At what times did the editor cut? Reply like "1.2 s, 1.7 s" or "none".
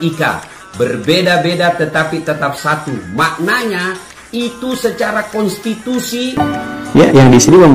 6.6 s